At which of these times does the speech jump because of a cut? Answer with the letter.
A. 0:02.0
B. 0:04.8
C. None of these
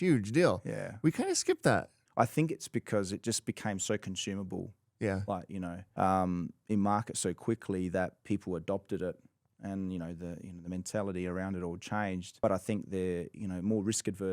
A